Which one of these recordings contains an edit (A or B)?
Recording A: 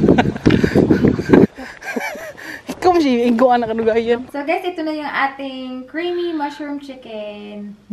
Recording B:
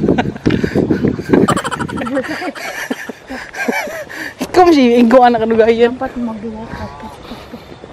A